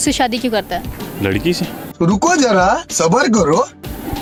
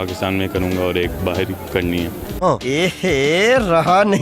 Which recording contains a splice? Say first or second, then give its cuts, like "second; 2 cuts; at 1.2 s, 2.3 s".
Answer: second; 1 cut; at 1.6 s